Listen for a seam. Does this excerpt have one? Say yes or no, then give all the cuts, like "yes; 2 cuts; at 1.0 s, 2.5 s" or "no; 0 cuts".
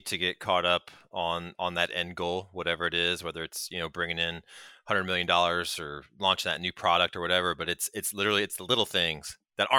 no; 0 cuts